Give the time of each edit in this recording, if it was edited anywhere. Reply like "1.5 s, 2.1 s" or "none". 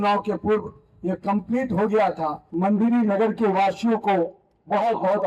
2.4 s